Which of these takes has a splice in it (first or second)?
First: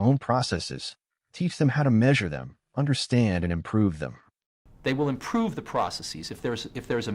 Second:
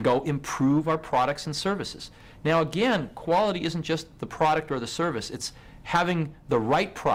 first